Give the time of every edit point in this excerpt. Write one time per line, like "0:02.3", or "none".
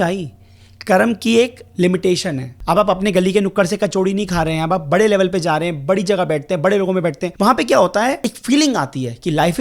0:02.6
0:07.2
0:08.3

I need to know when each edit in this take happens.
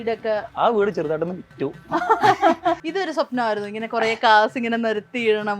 0:02.9

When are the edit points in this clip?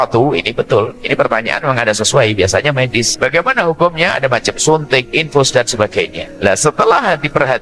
0:03.1
0:06.2

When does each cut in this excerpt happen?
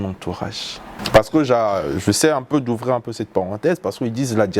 0:00.9

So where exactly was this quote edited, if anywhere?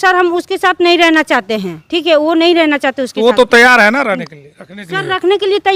none

